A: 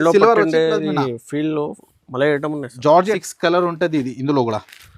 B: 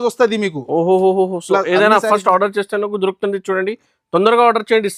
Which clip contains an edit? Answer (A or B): A